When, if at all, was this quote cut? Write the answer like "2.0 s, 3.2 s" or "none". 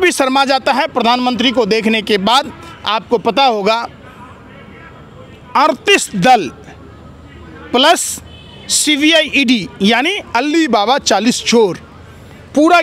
none